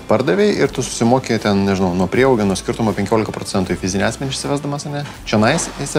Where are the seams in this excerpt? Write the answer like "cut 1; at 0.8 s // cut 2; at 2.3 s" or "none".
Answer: none